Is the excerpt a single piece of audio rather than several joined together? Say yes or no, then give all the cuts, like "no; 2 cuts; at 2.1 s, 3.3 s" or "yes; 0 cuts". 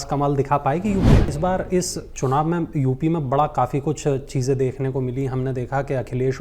no; 1 cut; at 1.3 s